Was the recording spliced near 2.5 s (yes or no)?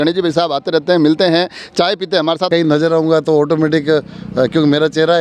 yes